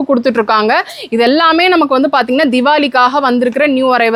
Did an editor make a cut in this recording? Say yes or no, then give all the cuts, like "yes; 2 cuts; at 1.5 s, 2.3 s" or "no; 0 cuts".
no; 0 cuts